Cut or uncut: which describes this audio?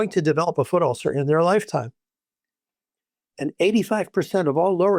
uncut